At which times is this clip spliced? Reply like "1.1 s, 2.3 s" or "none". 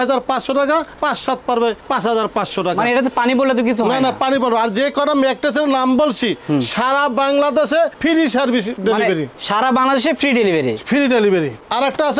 none